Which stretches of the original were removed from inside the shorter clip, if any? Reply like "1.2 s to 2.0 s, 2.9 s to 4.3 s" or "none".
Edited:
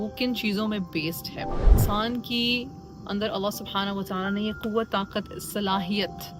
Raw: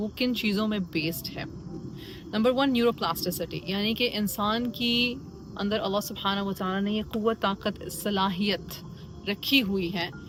1.8 s to 4.3 s